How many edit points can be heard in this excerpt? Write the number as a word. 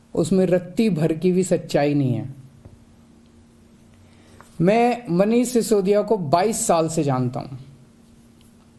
zero